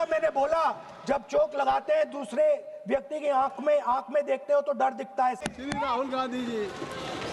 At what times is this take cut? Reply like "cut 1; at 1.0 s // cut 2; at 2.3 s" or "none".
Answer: cut 1; at 5.4 s

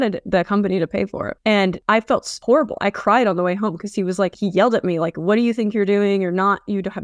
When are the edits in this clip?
none

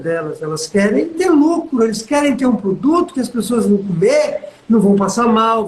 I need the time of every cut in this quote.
cut 1; at 1.1 s

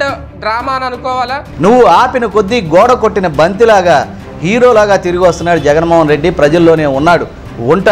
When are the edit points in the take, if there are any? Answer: cut 1; at 1.4 s

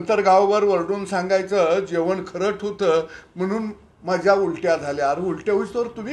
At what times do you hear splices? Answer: none

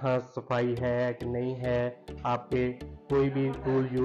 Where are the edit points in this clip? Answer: none

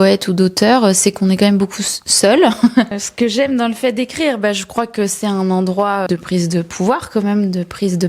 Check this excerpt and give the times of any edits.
cut 1; at 3.0 s // cut 2; at 6.1 s

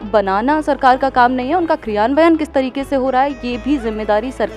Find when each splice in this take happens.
none

